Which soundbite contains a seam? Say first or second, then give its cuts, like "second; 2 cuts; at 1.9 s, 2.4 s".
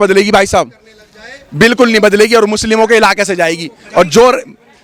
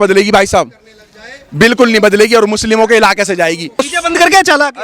second; 1 cut; at 3.9 s